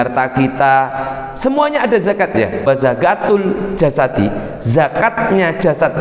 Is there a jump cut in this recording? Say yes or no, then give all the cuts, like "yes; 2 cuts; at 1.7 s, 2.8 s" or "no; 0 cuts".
yes; 1 cut; at 2.7 s